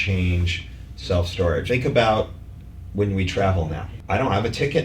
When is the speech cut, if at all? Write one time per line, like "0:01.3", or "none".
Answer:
0:01.6
0:03.9